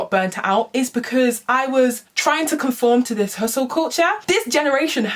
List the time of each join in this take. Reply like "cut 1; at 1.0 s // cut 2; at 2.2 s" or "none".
cut 1; at 2.1 s // cut 2; at 4.2 s